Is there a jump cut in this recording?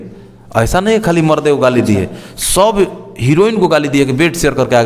no; 0 cuts

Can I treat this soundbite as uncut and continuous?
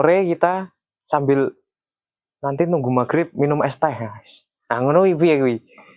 yes; 0 cuts

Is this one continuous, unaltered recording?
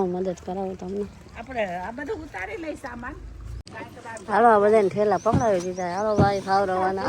no; 1 cut; at 3.6 s

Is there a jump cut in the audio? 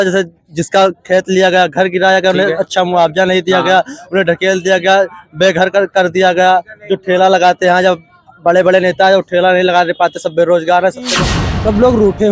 yes; 1 cut; at 11.2 s

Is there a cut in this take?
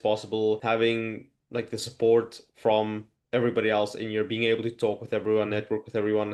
no; 0 cuts

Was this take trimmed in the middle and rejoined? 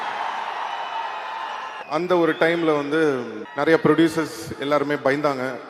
yes; 2 cuts; at 1.8 s, 3.4 s

